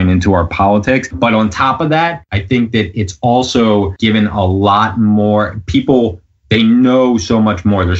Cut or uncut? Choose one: cut